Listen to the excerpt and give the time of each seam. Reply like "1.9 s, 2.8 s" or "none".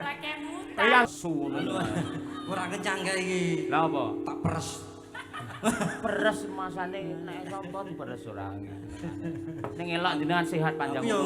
1.1 s